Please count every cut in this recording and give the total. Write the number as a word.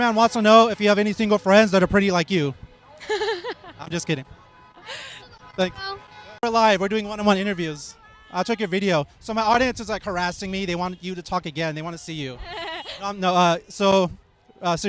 zero